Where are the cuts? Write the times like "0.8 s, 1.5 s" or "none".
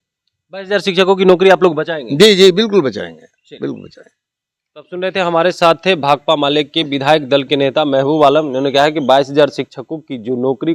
none